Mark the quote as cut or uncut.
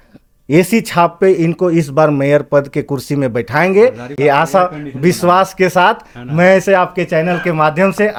uncut